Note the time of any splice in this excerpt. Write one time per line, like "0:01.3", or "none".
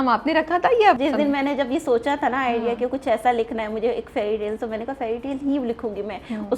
0:01.0